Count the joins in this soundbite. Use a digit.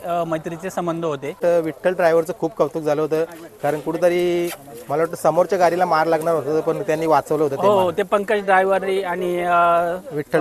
1